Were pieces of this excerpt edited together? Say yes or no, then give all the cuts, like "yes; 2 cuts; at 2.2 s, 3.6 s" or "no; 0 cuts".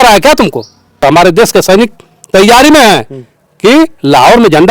yes; 1 cut; at 1.0 s